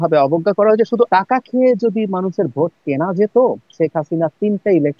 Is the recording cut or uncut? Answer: cut